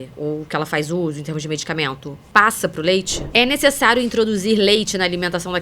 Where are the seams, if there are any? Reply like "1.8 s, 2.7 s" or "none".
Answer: 2.1 s, 3.2 s